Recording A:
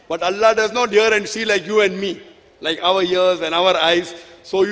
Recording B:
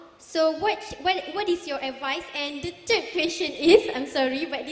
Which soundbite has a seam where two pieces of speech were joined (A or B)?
B